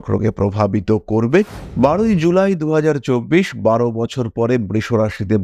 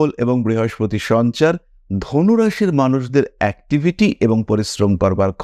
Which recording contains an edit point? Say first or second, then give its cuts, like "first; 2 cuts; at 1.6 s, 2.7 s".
first; 1 cut; at 1.6 s